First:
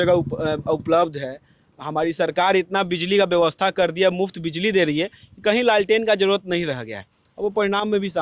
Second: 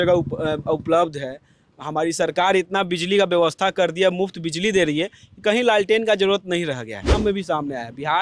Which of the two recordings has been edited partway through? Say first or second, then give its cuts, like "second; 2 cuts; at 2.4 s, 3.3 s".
second; 1 cut; at 7.2 s